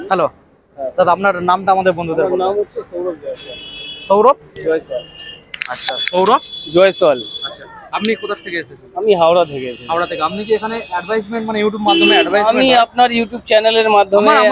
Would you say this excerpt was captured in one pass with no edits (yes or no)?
yes